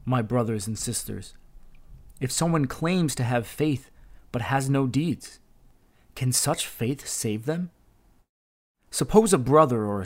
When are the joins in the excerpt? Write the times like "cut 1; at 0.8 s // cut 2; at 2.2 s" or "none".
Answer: cut 1; at 8.2 s